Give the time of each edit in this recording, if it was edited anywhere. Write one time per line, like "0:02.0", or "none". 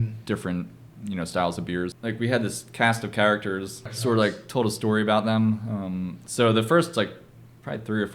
0:02.0
0:03.8